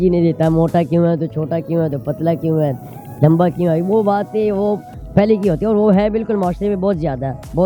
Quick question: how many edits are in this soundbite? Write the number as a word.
zero